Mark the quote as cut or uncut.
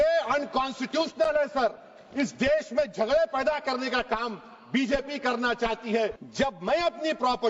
cut